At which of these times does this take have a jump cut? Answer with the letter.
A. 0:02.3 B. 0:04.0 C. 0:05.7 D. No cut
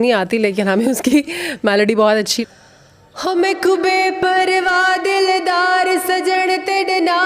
A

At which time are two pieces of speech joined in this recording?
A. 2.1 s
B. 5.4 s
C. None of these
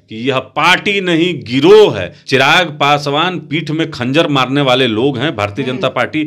A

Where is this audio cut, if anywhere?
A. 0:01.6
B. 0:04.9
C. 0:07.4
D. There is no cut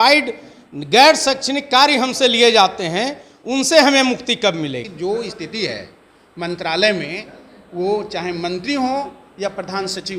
B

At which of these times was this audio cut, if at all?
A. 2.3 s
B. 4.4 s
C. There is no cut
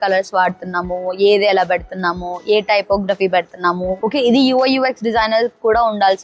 C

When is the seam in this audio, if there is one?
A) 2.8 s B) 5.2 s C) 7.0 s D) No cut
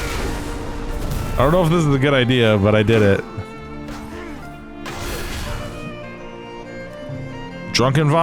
B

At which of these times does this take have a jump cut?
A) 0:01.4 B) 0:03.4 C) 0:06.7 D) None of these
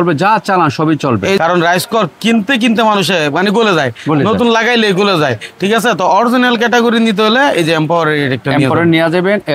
A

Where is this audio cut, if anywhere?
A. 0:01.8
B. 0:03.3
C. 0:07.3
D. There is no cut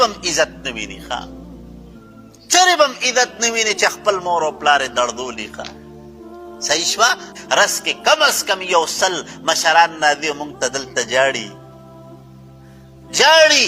C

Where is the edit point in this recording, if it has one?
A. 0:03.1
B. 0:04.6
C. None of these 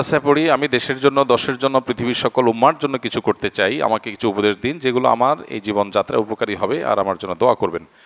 C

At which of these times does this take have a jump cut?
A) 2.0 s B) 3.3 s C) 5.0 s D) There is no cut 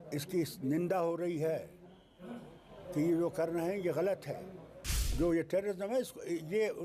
C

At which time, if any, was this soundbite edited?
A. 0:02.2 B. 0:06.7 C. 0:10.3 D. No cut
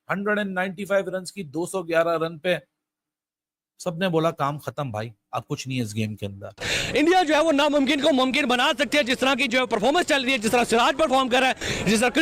B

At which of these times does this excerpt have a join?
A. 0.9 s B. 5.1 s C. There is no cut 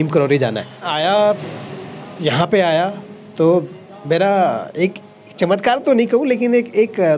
A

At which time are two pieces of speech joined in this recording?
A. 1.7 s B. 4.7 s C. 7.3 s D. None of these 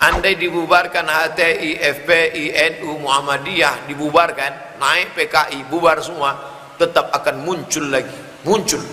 D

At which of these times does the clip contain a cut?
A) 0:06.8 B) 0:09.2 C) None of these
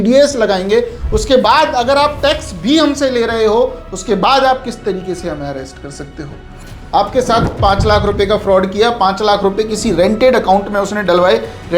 A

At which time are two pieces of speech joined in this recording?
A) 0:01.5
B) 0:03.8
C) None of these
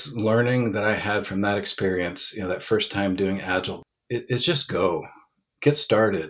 B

